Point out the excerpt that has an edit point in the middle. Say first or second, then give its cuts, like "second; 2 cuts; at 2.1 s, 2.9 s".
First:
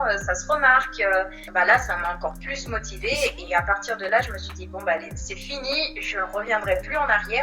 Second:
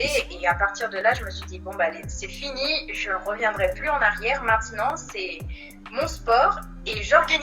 first; 1 cut; at 1.4 s